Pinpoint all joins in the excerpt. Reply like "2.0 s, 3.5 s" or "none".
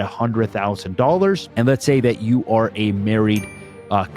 1.5 s